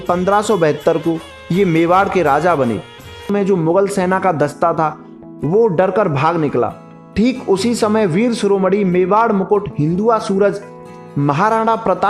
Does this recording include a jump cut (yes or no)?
yes